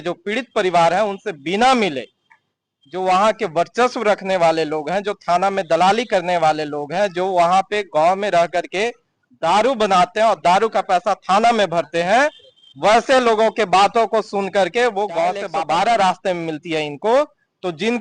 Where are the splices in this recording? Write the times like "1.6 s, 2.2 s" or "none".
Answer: 15.5 s